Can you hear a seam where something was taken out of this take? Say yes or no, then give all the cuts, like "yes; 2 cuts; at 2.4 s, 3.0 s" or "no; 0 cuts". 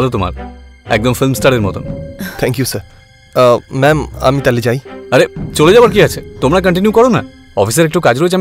no; 0 cuts